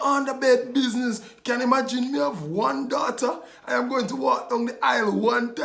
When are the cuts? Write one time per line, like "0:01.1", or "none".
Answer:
none

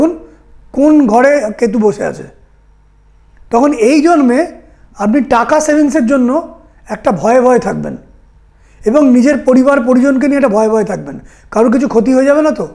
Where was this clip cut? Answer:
none

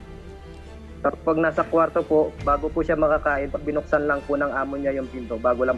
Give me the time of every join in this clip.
0:01.0

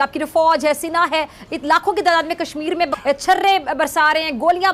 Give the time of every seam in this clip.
0:03.0

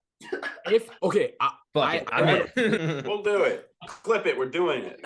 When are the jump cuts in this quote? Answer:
0:02.8

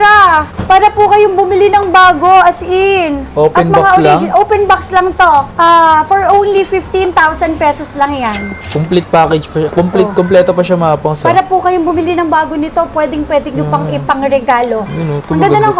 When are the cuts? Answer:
none

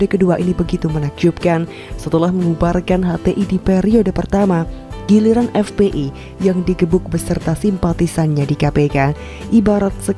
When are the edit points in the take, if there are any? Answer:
none

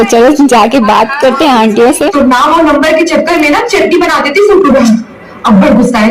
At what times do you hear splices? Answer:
0:02.1

